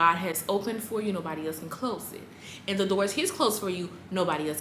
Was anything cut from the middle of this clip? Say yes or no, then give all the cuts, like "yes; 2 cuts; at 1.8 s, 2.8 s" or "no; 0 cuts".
no; 0 cuts